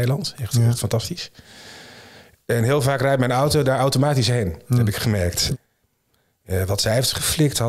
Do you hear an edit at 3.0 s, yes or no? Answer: no